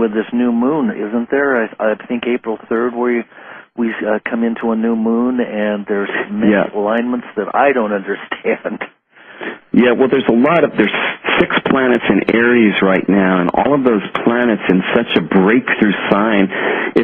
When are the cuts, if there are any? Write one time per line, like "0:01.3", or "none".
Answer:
0:10.6